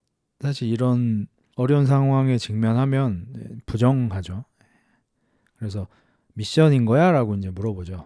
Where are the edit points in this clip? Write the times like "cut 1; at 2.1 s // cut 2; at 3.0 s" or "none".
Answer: cut 1; at 1.4 s